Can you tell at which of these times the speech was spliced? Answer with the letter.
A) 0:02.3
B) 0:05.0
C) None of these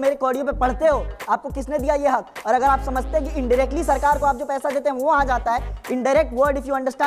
C